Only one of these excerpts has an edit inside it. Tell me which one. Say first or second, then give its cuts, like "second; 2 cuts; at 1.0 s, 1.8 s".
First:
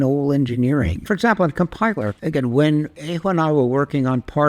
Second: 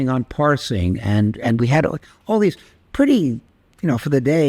first; 3 cuts; at 1.1 s, 2.2 s, 3.0 s